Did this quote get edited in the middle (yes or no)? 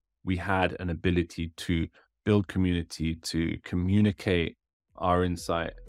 yes